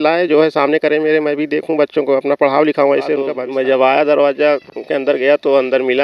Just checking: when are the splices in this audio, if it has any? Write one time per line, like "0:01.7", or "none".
0:03.4